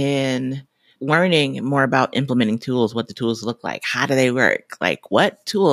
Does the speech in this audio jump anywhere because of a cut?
no; 0 cuts

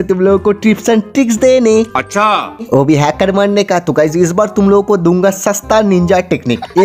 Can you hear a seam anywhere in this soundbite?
no; 0 cuts

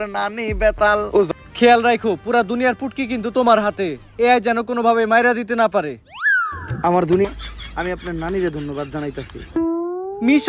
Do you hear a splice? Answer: yes; 2 cuts; at 1.3 s, 7.2 s

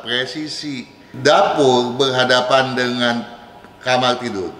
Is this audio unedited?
no; 1 cut; at 1.1 s

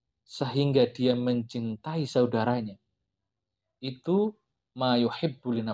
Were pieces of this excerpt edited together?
no; 0 cuts

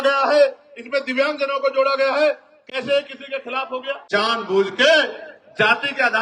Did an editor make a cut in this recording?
yes; 1 cut; at 4.0 s

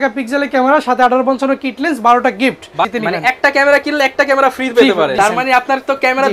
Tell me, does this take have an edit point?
yes; 2 cuts; at 2.9 s, 5.1 s

